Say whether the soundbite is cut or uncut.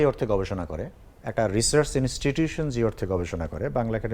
uncut